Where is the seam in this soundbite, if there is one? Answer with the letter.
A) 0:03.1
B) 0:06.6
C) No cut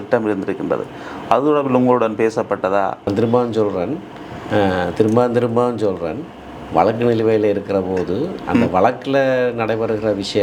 A